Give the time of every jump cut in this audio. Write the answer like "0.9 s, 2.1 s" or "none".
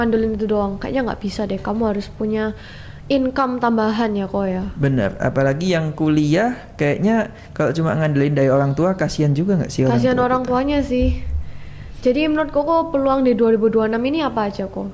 none

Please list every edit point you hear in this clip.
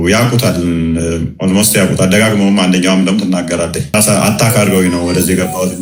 none

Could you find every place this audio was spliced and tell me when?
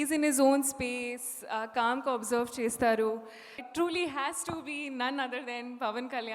3.6 s

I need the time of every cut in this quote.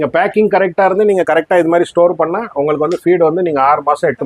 none

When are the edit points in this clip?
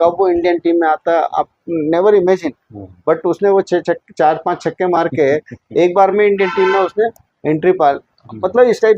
none

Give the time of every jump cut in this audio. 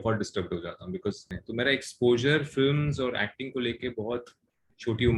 1.3 s

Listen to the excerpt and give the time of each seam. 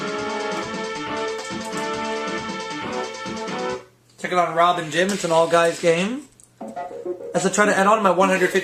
2.0 s

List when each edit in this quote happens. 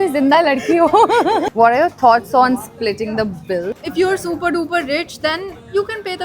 1.5 s, 3.8 s

